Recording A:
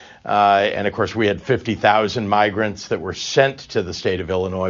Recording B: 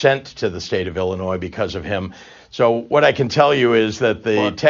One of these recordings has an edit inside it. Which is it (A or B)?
B